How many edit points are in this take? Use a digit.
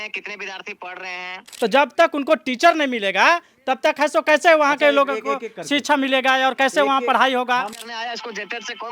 2